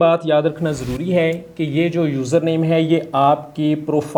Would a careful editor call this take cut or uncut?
uncut